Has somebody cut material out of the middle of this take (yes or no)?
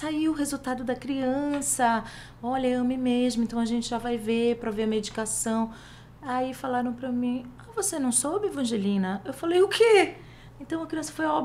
no